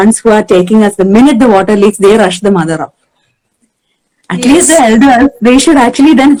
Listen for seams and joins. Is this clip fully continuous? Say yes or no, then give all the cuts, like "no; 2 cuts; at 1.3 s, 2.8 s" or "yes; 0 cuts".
yes; 0 cuts